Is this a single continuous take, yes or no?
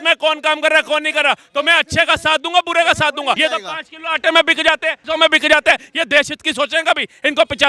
no